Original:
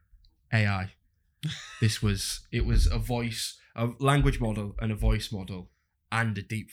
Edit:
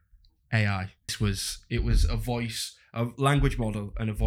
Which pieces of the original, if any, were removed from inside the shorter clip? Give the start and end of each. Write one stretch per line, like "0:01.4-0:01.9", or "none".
0:01.1-0:02.0